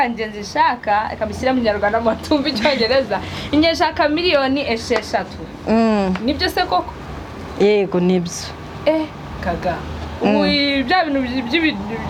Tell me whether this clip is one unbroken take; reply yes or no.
yes